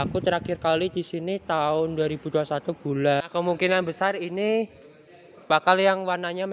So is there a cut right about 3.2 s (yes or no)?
yes